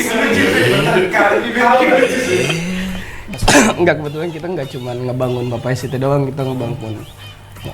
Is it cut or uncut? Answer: cut